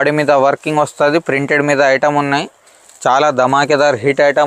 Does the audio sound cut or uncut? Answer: uncut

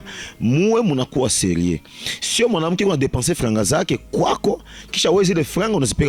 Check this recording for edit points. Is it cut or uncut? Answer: uncut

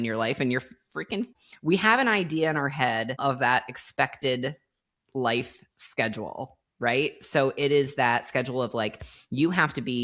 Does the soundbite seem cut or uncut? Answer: cut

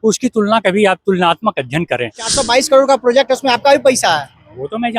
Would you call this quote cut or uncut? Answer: cut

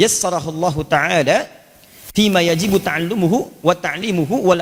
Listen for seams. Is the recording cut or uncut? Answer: uncut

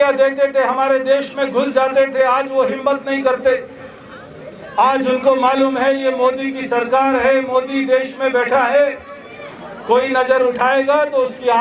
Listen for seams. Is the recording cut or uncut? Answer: uncut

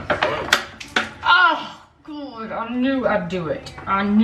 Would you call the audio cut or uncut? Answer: uncut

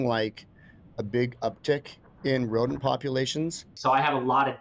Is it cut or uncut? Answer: cut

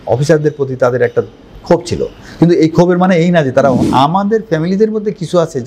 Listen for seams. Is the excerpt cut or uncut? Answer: cut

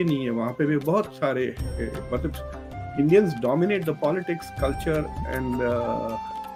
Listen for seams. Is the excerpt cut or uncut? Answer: uncut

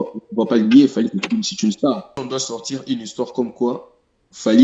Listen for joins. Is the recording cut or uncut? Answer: cut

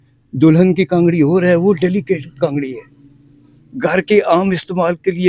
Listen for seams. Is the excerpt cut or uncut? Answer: uncut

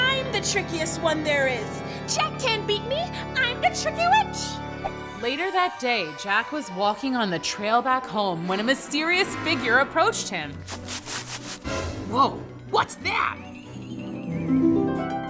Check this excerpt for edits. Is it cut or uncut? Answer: uncut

